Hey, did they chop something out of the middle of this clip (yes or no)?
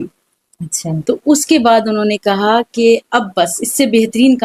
no